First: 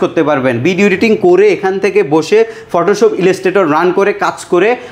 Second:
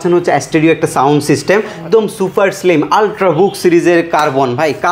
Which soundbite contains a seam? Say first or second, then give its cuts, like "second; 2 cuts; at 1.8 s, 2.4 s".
second; 1 cut; at 1.8 s